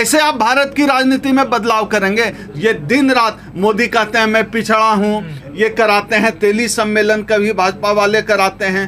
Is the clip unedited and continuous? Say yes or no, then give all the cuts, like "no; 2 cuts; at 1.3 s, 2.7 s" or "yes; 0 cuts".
yes; 0 cuts